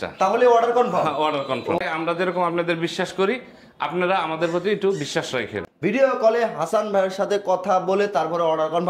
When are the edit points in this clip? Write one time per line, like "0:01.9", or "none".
0:01.8
0:05.6